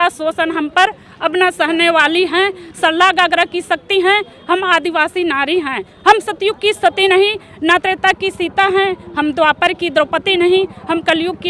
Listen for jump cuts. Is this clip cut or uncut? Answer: uncut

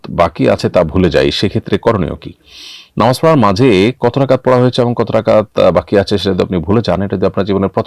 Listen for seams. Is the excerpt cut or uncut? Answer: uncut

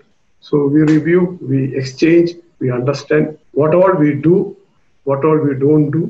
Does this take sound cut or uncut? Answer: cut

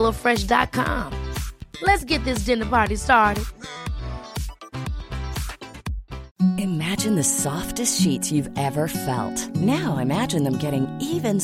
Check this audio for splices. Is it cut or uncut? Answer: cut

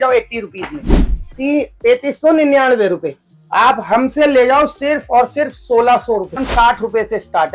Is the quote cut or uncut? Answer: cut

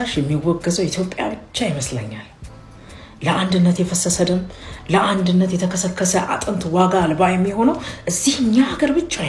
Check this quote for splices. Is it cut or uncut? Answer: uncut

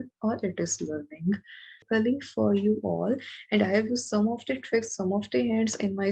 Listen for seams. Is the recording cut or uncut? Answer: cut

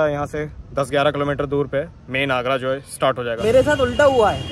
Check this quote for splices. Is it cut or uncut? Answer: cut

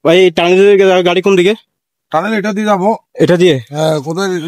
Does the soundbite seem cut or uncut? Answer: uncut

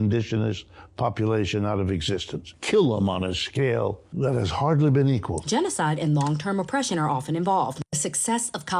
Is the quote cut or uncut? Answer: cut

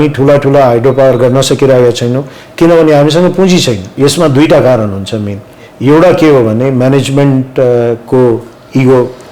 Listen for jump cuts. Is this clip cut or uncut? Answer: cut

